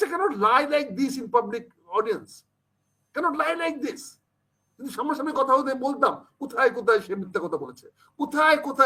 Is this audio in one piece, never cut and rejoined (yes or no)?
yes